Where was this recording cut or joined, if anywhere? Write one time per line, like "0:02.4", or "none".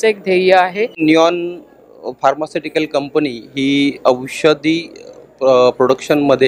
0:01.0